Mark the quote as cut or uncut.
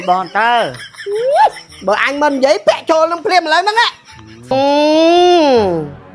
cut